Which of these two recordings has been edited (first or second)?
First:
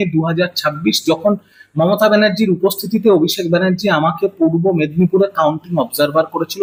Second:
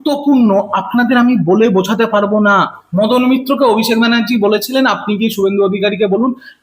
second